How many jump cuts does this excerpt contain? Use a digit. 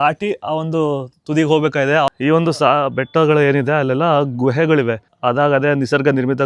2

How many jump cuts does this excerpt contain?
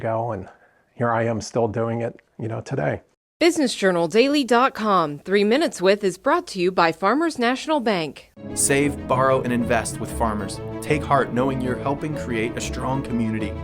1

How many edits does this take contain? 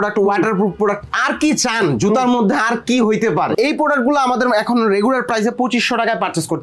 1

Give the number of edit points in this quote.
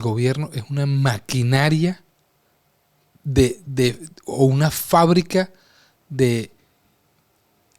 0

